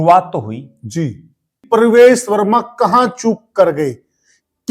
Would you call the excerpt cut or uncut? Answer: cut